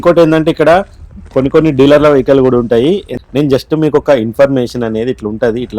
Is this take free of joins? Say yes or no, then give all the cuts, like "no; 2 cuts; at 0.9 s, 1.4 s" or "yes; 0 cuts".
no; 1 cut; at 3.1 s